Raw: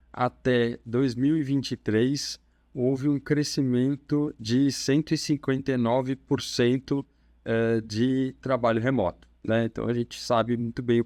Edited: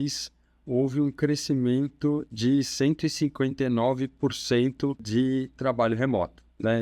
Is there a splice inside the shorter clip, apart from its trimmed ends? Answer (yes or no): yes